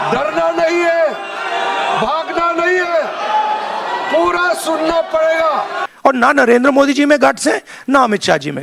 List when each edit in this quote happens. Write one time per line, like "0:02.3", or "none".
0:05.8